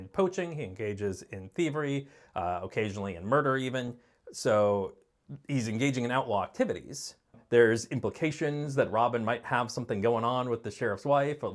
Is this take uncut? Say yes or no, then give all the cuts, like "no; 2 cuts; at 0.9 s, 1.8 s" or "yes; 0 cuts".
no; 1 cut; at 7.4 s